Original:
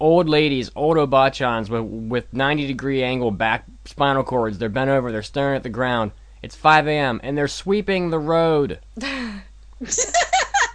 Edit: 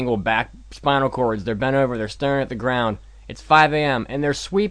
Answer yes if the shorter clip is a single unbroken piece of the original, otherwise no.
yes